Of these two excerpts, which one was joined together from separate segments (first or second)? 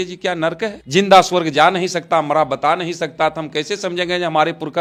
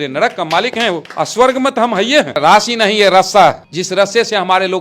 second